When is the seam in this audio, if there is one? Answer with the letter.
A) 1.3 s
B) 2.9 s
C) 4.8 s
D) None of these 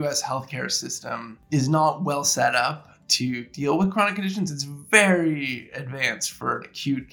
A